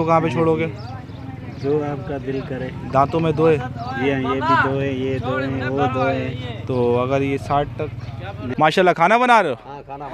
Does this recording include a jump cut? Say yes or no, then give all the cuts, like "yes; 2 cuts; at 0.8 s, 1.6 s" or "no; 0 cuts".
yes; 1 cut; at 8.5 s